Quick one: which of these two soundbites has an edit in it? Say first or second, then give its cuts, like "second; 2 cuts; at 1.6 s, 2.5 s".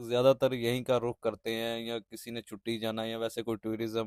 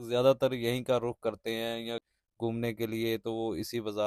second; 1 cut; at 2.2 s